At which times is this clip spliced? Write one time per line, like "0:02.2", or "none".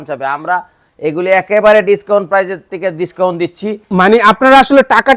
0:03.8